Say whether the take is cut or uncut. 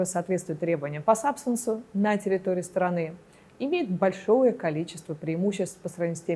uncut